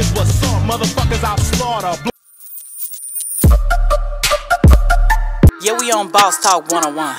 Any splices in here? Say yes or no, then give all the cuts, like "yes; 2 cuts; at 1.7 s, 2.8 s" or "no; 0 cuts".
yes; 1 cut; at 2.1 s